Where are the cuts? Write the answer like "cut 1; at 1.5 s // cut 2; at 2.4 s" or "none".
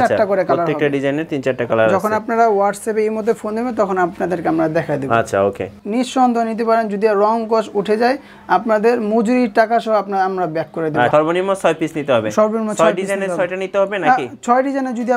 cut 1; at 5.8 s // cut 2; at 11.1 s